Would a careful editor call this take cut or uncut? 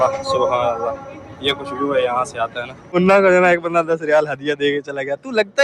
uncut